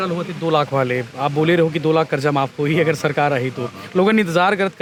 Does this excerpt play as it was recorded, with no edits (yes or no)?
yes